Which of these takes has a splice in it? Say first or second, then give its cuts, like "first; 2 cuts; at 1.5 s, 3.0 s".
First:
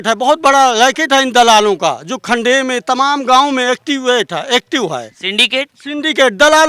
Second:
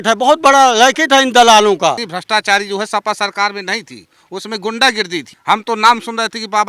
second; 2 cuts; at 2.1 s, 5.3 s